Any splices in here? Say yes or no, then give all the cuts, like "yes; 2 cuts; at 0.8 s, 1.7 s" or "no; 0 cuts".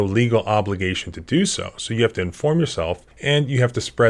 yes; 1 cut; at 3.1 s